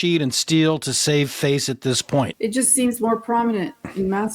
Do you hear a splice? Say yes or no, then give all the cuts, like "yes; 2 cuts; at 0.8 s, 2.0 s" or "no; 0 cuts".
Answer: yes; 1 cut; at 2.3 s